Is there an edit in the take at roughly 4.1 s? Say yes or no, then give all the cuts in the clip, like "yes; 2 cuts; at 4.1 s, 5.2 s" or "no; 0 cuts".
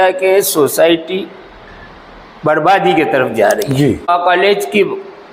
yes; 1 cut; at 4.1 s